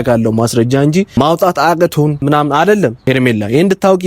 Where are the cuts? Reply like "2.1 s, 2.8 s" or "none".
1.1 s, 2.2 s, 3.0 s